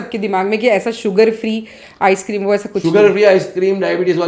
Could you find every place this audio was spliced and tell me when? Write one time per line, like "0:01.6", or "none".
none